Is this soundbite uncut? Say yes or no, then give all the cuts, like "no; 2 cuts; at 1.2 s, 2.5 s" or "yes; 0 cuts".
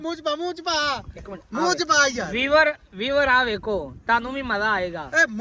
yes; 0 cuts